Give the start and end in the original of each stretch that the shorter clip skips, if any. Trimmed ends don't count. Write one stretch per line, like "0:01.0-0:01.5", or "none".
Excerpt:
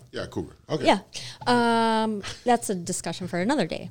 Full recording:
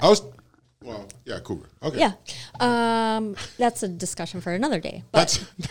none